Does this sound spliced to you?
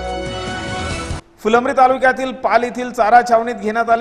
yes; 1 cut; at 0.9 s

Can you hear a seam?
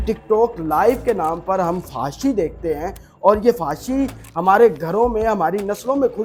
no; 0 cuts

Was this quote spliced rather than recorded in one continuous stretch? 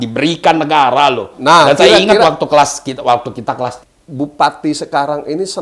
yes; 1 cut; at 3.9 s

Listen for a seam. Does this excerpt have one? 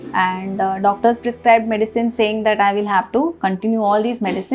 no; 0 cuts

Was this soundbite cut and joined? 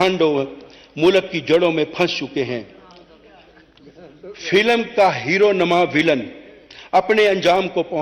no; 0 cuts

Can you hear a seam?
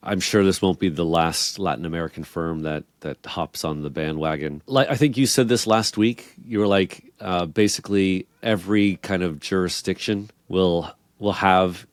no; 0 cuts

